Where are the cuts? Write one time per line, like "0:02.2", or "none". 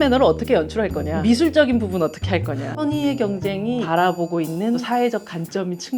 0:01.1
0:02.7
0:03.8
0:04.8